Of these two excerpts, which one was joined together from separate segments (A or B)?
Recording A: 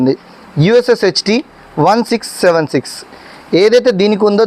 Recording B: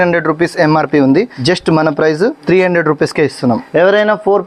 B